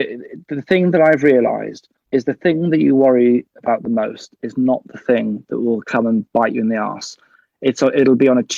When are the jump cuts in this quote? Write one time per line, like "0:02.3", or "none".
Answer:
none